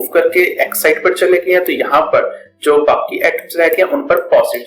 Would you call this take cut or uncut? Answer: uncut